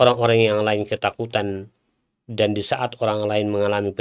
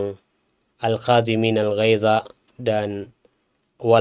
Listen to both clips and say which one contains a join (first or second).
second